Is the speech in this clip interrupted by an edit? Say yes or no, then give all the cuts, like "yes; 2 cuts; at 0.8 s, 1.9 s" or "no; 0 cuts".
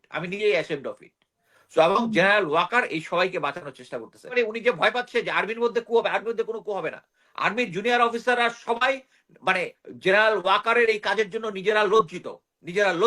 yes; 1 cut; at 4.3 s